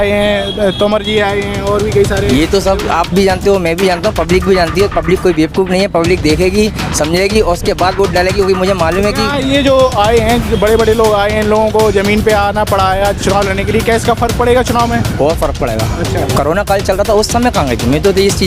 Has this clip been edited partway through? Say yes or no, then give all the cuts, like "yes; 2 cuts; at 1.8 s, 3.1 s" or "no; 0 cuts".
yes; 1 cut; at 16.3 s